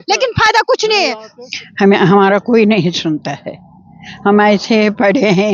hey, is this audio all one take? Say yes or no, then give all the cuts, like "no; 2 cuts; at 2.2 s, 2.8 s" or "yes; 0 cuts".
yes; 0 cuts